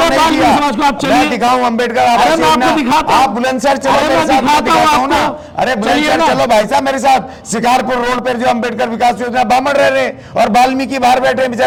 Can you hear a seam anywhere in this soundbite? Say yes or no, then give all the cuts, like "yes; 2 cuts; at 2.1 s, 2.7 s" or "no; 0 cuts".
no; 0 cuts